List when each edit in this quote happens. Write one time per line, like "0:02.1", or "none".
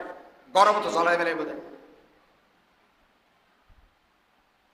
none

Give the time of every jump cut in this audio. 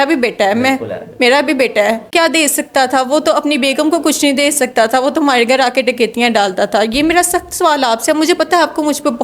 0:02.1

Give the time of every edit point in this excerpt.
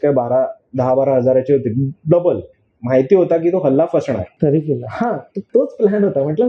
0:04.4
0:05.3

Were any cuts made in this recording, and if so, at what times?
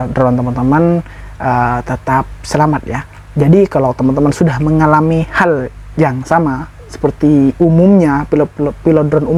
none

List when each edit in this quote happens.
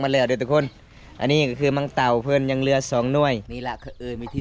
0:03.5

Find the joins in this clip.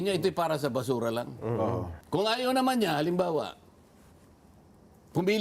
0:01.9

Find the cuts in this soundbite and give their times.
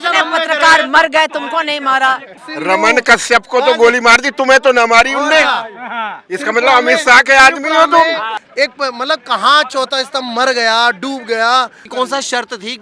0:02.4
0:08.3
0:11.8

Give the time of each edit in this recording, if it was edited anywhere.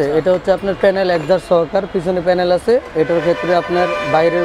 none

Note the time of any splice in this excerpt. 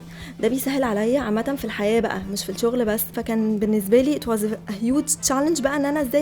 0:03.2

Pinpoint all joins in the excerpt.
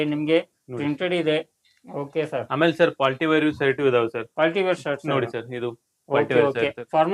none

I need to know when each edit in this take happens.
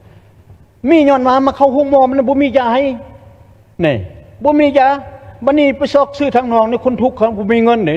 none

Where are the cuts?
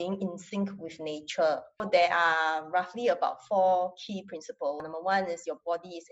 0:01.8
0:04.8

